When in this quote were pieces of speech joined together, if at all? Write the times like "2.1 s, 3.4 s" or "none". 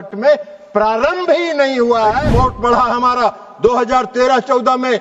2.3 s